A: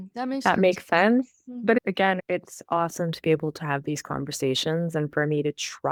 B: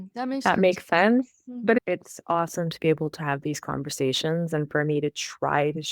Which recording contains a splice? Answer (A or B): B